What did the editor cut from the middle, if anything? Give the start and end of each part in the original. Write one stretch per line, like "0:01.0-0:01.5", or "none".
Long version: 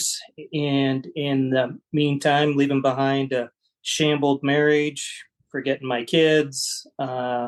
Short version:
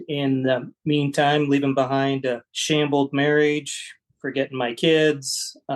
0:03.6-0:03.8